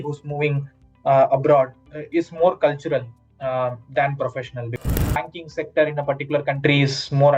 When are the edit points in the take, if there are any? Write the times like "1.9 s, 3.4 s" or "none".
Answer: 4.8 s